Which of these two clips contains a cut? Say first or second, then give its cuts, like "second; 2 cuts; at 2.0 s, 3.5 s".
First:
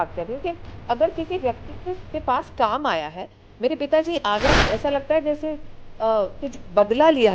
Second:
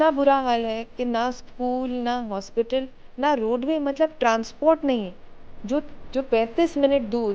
first; 1 cut; at 4.5 s